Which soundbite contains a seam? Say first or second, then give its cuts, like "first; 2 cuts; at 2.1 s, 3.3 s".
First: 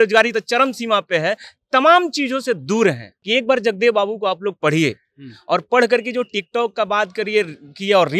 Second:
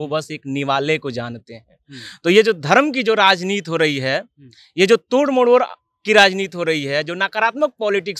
first; 1 cut; at 3.1 s